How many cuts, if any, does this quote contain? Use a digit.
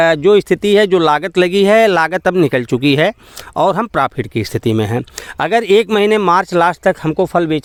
0